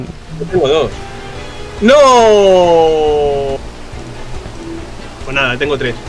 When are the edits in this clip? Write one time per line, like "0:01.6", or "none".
none